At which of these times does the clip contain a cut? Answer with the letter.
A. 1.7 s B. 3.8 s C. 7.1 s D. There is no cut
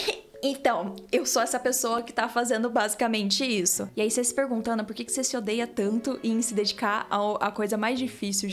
B